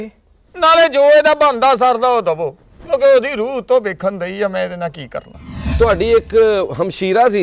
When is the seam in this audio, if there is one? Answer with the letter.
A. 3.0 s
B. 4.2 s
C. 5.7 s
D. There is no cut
C